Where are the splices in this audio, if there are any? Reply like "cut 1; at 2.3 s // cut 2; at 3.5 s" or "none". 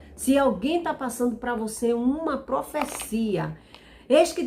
none

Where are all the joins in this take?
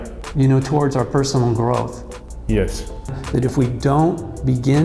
cut 1; at 3.2 s

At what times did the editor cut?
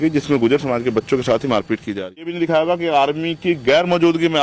cut 1; at 2.3 s

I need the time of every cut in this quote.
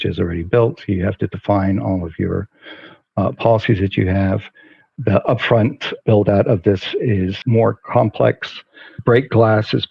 cut 1; at 7.4 s

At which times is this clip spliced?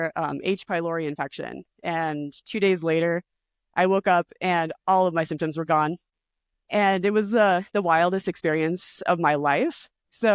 cut 1; at 6.1 s

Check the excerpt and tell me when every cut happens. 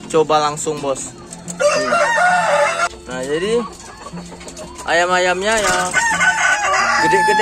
cut 1; at 2.9 s

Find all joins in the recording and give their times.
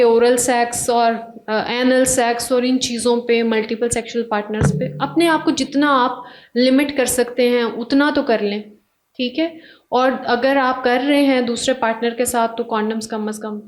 none

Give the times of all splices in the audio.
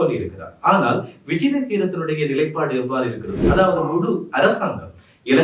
none

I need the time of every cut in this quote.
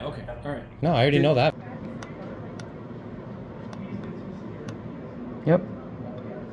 cut 1; at 1.5 s

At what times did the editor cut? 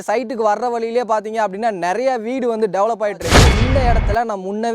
cut 1; at 3.6 s

